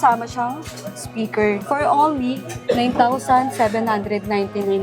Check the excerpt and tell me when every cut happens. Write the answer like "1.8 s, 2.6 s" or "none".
1.6 s